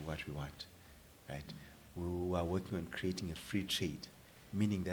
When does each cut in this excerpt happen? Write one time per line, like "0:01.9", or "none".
none